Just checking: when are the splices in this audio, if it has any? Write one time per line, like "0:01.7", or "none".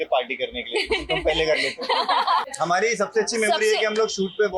0:02.4